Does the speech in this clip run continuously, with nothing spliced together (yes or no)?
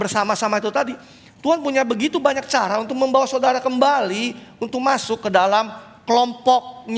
yes